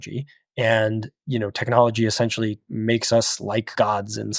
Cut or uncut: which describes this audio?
uncut